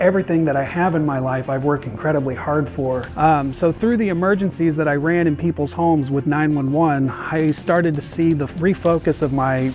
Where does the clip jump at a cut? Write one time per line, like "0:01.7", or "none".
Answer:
0:03.1
0:08.5